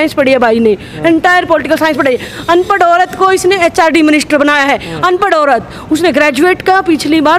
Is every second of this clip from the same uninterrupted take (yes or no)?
yes